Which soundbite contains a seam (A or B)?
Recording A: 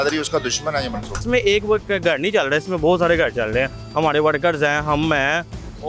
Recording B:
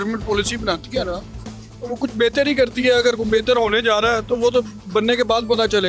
A